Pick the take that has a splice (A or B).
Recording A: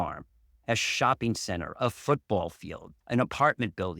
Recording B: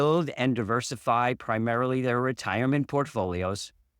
A